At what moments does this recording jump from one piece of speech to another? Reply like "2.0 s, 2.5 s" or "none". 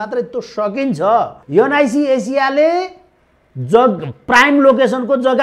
1.4 s